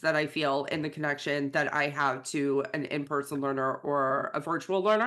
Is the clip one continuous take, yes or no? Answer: yes